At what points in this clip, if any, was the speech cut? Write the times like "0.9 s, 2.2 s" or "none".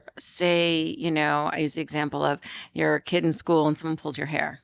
none